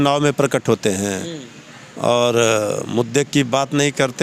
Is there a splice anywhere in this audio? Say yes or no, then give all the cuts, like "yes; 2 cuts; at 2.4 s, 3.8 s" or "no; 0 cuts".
no; 0 cuts